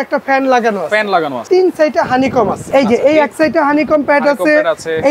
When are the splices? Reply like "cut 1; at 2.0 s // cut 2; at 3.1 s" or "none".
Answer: cut 1; at 1.4 s // cut 2; at 2.6 s